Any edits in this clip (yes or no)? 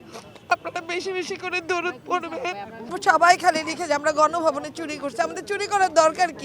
yes